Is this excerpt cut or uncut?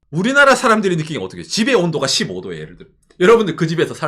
uncut